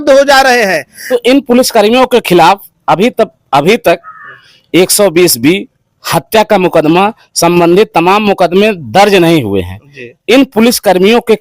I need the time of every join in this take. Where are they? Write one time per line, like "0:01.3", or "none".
0:00.9